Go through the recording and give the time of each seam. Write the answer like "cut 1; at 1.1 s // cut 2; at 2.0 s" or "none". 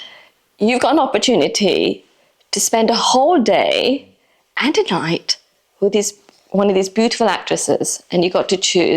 none